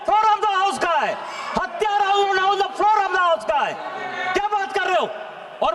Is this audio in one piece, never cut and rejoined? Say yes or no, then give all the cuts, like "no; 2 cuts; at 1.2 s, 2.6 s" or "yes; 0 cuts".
yes; 0 cuts